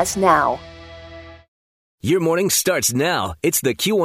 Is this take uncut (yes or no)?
no